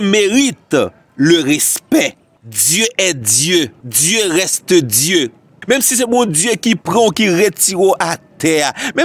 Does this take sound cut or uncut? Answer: uncut